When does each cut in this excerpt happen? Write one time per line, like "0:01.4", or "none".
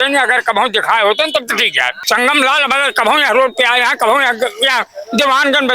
0:02.0

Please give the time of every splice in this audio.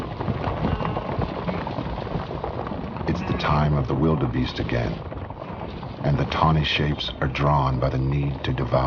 0:04.3

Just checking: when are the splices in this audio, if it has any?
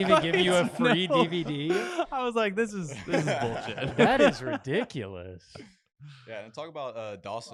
none

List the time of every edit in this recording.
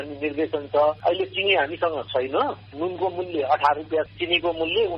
0:01.0
0:04.1

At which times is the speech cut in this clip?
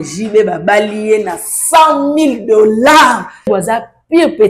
0:03.5

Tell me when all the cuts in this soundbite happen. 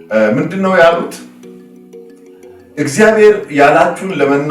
0:01.2
0:02.6

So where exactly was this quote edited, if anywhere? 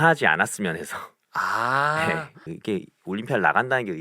0:02.3

